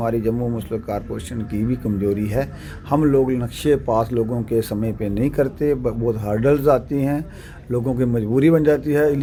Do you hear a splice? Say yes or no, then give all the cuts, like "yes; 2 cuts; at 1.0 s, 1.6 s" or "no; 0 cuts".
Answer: no; 0 cuts